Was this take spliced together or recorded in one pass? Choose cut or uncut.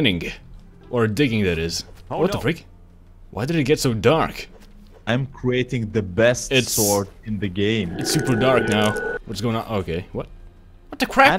uncut